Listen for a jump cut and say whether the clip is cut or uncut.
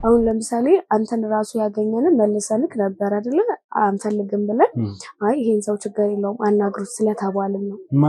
uncut